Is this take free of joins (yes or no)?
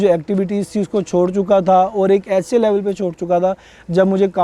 yes